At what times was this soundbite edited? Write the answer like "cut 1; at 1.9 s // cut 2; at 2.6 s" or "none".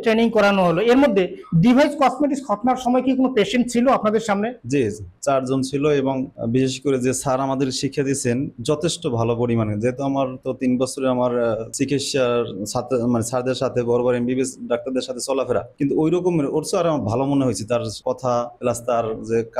none